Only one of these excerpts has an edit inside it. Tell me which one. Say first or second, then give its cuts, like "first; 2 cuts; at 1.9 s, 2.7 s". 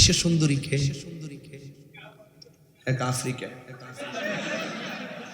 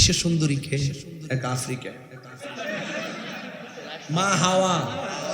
second; 1 cut; at 1.2 s